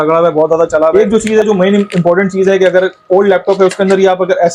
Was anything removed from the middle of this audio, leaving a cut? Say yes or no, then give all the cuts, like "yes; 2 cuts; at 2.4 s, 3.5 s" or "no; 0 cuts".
yes; 1 cut; at 0.9 s